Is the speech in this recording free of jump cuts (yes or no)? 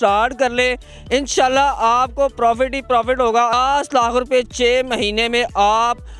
no